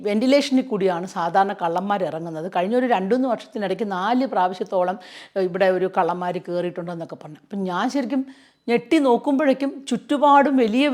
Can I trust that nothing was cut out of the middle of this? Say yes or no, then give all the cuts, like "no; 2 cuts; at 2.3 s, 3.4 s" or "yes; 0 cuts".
yes; 0 cuts